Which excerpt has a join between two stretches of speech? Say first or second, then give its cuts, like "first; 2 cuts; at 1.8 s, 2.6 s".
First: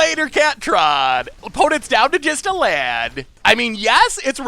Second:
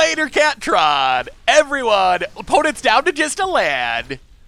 first; 2 cuts; at 1.4 s, 3.3 s